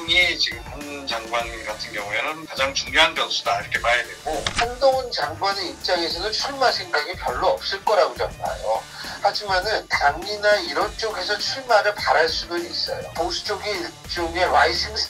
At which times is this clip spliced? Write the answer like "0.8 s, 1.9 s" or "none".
none

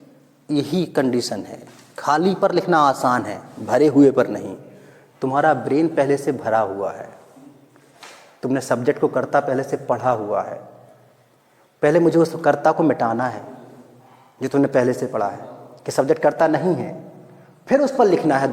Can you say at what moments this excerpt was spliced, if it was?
none

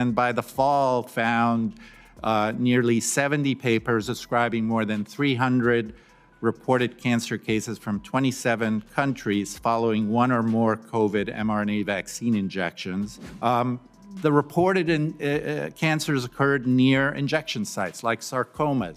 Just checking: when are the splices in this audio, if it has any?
13.2 s

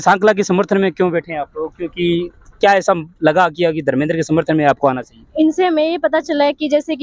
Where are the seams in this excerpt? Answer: none

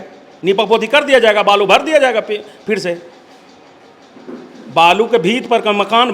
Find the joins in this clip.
none

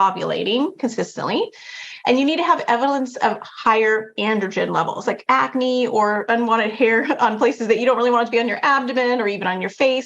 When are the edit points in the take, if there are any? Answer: 5.0 s, 6.2 s

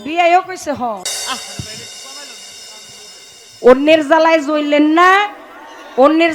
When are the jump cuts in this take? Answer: 1.1 s

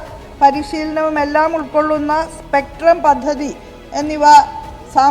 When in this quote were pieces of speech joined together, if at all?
none

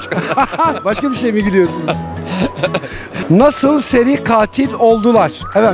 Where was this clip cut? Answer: 3.2 s

